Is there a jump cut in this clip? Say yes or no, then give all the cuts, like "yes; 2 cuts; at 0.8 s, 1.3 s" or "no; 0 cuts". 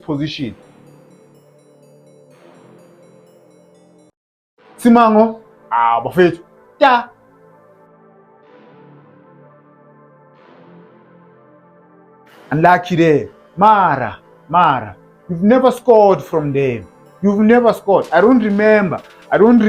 no; 0 cuts